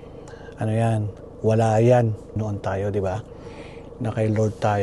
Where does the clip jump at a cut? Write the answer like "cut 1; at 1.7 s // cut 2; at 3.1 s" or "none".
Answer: cut 1; at 2.2 s